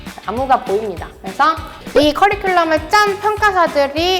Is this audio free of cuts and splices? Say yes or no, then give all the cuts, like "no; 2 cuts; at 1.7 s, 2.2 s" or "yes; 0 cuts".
no; 1 cut; at 1.7 s